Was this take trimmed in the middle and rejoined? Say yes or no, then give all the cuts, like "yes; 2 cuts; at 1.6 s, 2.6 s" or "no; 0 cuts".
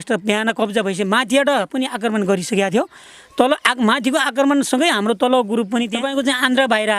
yes; 1 cut; at 6.0 s